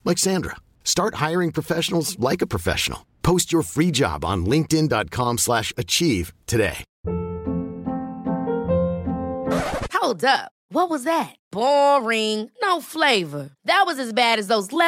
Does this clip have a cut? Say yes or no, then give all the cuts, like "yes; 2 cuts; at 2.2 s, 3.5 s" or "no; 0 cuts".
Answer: yes; 1 cut; at 6.9 s